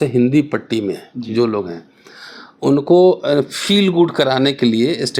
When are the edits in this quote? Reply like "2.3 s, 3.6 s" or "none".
none